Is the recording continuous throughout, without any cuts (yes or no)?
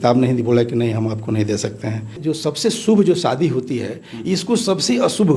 no